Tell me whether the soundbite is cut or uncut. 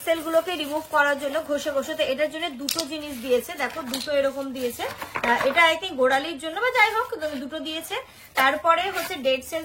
uncut